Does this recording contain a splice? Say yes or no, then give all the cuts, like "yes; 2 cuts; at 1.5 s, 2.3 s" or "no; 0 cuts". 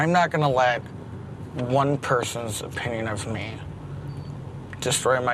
no; 0 cuts